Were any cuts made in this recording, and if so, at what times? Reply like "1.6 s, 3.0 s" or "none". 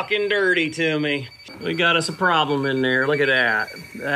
1.3 s

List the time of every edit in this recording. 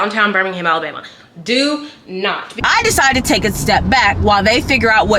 2.5 s

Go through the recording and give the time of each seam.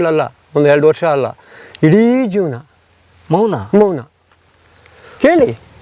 none

